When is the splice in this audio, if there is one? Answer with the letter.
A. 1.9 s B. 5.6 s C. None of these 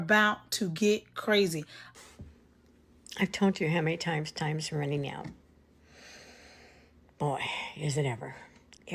A